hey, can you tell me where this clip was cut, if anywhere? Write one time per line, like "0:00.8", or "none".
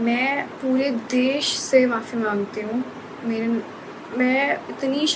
none